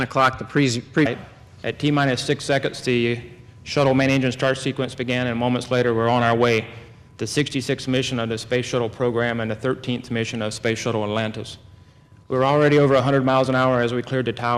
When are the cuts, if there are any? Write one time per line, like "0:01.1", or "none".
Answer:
none